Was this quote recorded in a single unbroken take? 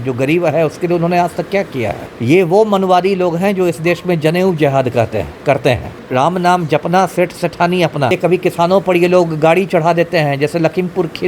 no; 3 cuts; at 2.1 s, 5.9 s, 8.1 s

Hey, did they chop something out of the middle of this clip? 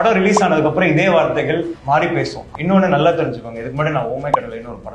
yes; 2 cuts; at 1.8 s, 2.5 s

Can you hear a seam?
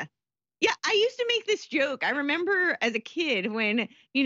no; 0 cuts

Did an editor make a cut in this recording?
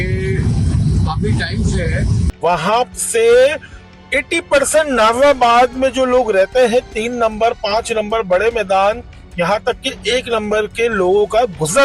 yes; 1 cut; at 2.3 s

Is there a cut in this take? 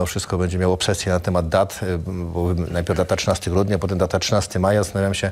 no; 0 cuts

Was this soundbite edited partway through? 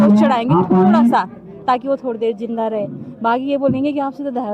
no; 0 cuts

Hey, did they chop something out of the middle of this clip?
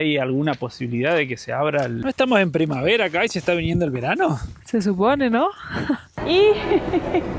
yes; 2 cuts; at 2.0 s, 6.1 s

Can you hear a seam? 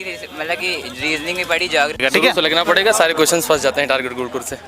yes; 1 cut; at 2.0 s

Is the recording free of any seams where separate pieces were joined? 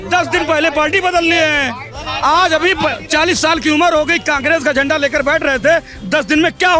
yes; 0 cuts

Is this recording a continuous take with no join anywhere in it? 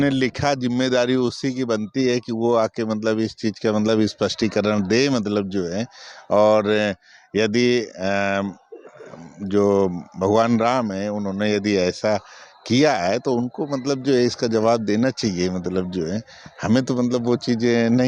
yes; 0 cuts

